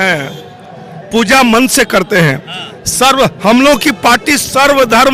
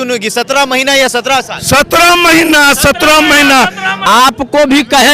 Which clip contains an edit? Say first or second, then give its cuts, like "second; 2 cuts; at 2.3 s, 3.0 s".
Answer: second; 1 cut; at 3.9 s